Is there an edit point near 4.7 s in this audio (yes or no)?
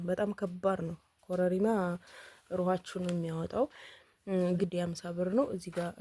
yes